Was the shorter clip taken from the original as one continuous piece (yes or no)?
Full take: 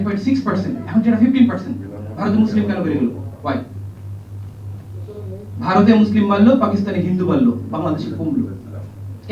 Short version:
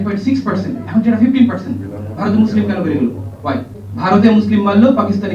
no